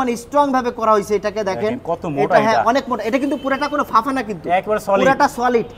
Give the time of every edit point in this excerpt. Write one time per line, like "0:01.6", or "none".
none